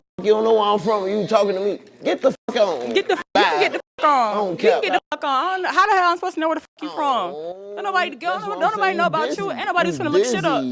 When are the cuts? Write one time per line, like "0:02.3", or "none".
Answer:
none